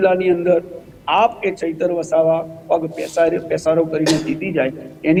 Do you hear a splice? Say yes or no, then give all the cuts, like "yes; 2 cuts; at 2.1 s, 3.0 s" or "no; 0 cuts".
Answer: no; 0 cuts